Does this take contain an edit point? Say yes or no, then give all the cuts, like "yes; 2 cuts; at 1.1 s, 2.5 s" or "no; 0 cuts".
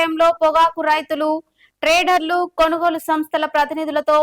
no; 0 cuts